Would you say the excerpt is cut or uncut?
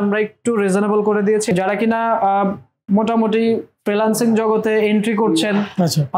cut